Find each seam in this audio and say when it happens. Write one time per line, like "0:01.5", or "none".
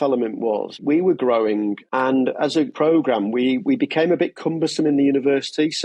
0:00.8
0:01.8
0:02.7